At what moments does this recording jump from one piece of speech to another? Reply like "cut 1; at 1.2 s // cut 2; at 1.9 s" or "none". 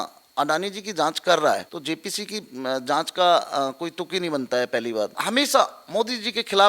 cut 1; at 1.7 s // cut 2; at 5.2 s